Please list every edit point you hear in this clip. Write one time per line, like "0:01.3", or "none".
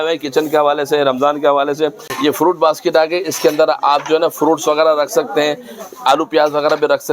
0:02.1